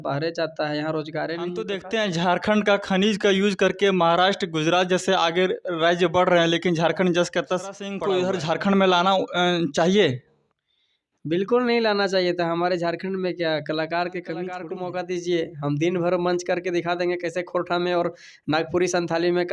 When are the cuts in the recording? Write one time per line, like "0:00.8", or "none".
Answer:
0:01.8
0:07.9
0:14.7